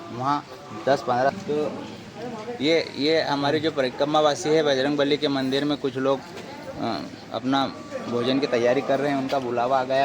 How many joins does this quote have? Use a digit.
1